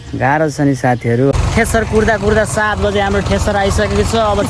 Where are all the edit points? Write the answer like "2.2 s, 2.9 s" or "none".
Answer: 1.3 s